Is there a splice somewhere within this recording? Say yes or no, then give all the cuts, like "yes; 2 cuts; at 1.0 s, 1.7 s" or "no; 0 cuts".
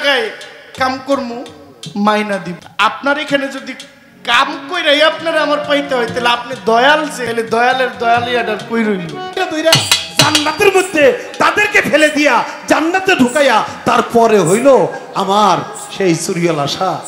yes; 3 cuts; at 2.6 s, 7.2 s, 9.4 s